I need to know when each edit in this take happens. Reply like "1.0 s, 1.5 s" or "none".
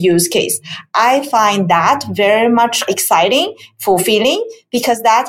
2.9 s